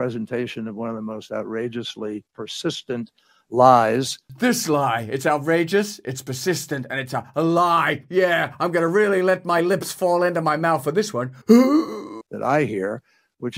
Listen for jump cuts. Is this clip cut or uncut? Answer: uncut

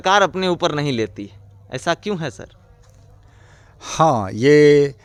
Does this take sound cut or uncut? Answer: uncut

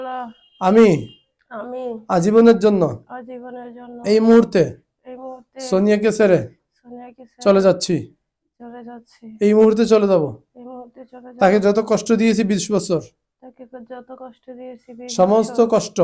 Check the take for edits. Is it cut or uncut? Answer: uncut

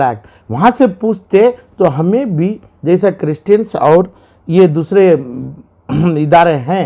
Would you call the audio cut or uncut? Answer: uncut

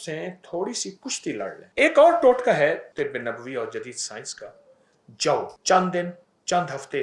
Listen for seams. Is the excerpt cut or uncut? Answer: cut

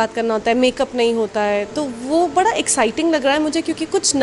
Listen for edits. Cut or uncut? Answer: uncut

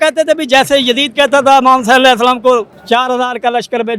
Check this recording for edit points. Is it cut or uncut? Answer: cut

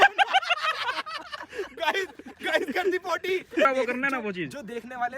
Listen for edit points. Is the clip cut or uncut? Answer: cut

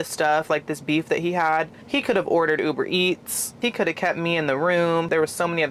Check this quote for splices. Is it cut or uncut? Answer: uncut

